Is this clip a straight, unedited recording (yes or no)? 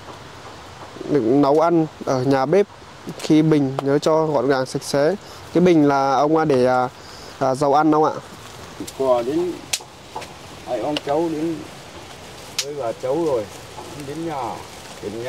no